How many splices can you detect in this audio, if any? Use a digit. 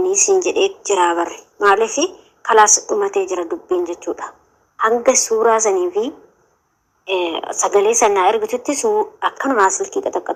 0